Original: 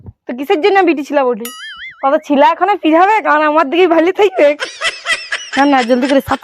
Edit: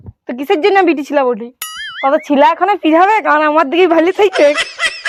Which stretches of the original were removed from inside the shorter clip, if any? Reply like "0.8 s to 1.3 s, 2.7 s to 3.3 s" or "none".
none